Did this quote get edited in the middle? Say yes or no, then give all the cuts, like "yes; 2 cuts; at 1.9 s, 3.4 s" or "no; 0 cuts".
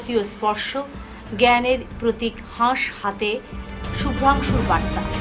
no; 0 cuts